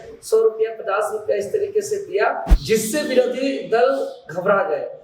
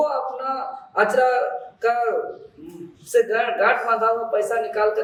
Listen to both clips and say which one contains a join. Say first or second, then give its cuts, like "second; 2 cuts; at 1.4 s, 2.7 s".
first; 1 cut; at 2.5 s